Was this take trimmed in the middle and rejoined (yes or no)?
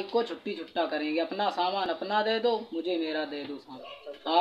no